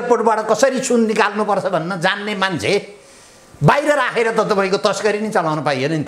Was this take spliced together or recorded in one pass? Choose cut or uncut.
uncut